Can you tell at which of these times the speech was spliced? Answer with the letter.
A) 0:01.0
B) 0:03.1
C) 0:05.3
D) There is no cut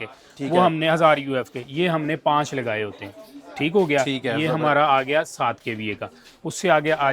D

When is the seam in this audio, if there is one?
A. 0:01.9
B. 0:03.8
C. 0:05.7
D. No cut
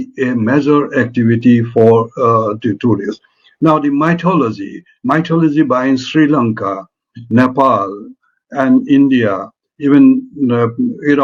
D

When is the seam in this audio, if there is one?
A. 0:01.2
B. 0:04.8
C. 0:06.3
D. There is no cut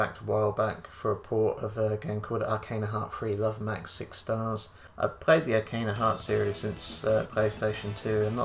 B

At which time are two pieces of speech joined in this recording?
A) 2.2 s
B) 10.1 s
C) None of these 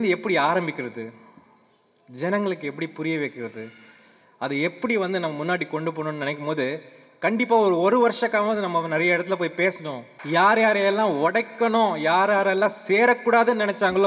B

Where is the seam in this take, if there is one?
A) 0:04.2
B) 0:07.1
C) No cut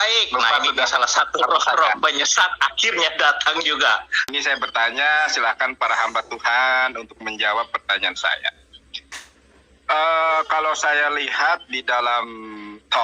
A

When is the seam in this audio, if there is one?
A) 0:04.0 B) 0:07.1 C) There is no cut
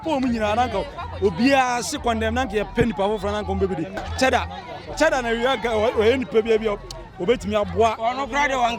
A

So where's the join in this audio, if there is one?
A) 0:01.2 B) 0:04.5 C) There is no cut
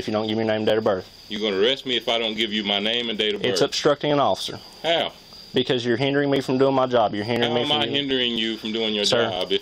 A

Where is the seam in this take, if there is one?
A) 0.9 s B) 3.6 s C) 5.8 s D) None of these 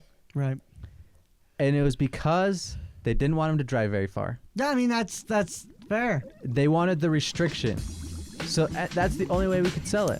D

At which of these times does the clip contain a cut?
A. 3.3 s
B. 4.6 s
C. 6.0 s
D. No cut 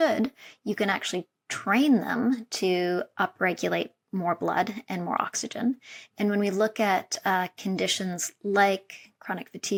D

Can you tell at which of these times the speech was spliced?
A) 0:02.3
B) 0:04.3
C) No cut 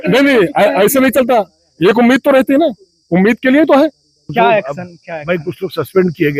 B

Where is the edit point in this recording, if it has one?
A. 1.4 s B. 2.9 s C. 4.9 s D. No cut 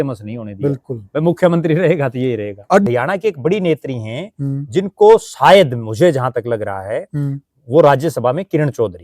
B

